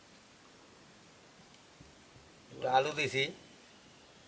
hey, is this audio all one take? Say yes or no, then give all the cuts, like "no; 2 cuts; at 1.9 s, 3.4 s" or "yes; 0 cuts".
yes; 0 cuts